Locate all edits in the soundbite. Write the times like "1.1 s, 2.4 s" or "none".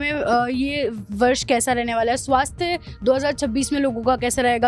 none